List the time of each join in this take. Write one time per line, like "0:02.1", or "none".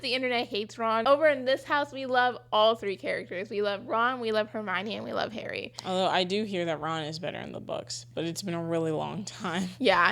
0:01.0